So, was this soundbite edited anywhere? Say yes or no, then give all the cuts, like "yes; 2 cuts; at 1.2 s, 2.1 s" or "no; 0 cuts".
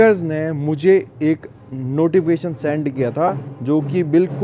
no; 0 cuts